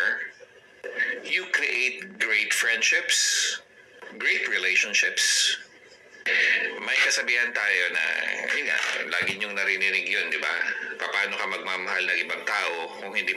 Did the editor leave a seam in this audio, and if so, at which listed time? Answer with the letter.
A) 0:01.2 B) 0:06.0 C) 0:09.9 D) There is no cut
D